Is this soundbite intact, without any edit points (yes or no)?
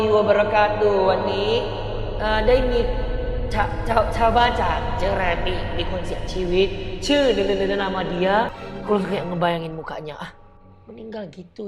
yes